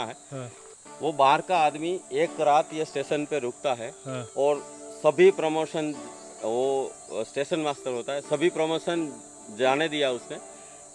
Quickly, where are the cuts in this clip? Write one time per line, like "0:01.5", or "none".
none